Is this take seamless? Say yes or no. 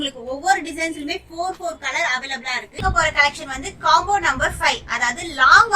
no